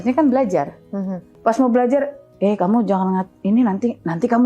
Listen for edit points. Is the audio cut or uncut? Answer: cut